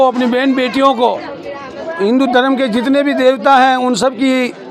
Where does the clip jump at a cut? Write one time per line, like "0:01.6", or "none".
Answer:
0:01.9